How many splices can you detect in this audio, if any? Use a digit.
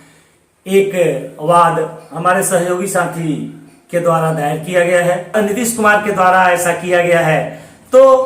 1